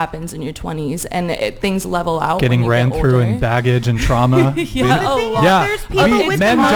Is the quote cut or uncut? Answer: uncut